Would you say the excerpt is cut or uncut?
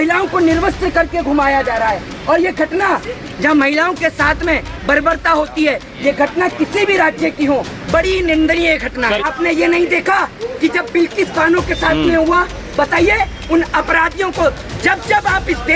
cut